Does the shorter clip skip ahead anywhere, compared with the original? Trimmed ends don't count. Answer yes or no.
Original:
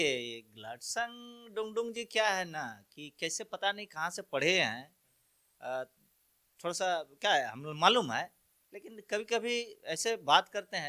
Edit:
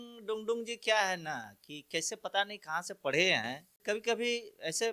yes